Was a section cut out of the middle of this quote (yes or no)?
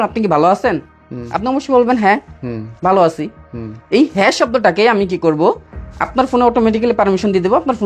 no